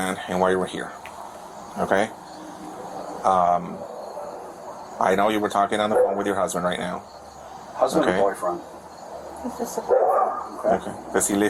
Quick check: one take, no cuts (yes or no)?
yes